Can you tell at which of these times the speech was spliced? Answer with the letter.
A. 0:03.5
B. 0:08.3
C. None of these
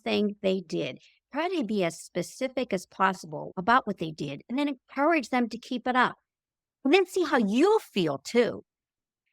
A